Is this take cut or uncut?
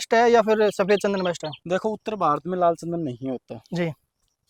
uncut